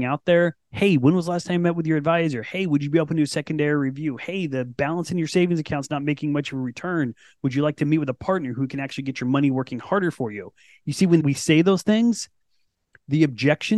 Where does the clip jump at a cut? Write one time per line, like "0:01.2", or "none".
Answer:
none